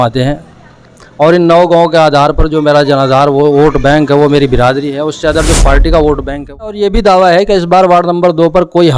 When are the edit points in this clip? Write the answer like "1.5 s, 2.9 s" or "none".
6.8 s